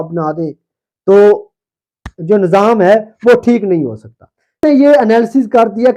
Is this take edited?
yes; 1 cut; at 4.6 s

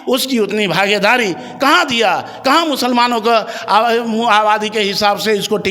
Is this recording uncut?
yes; 0 cuts

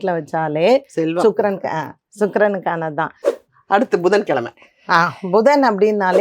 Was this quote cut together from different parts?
yes; 1 cut; at 3.4 s

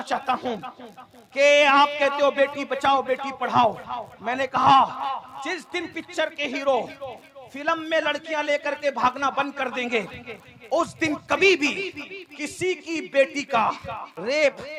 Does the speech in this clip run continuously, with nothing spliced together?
yes; 0 cuts

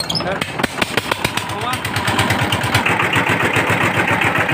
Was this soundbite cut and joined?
yes; 1 cut; at 2.8 s

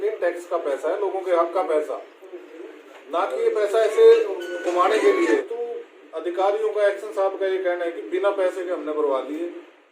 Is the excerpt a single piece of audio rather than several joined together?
no; 1 cut; at 5.5 s

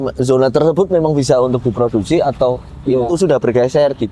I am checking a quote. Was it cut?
no; 0 cuts

